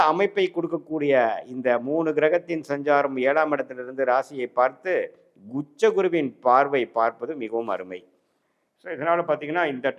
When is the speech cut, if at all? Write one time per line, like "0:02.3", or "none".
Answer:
none